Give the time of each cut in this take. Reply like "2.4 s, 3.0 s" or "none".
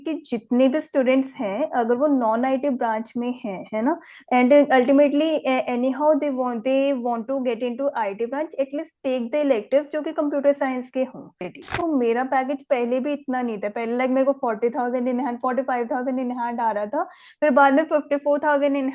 11.7 s